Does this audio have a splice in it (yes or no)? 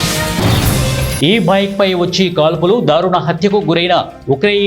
yes